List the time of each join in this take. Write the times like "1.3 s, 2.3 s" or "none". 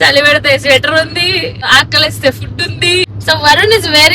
3.1 s